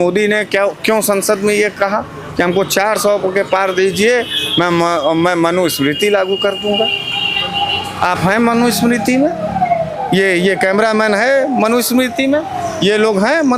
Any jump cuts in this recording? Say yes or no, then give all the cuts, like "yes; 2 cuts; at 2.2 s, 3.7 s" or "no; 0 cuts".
no; 0 cuts